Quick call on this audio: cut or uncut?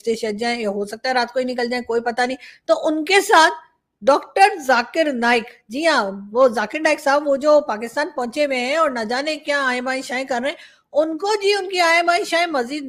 uncut